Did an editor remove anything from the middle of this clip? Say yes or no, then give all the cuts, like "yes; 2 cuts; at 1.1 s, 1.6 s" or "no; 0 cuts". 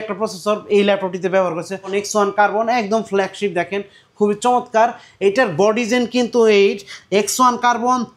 yes; 1 cut; at 1.9 s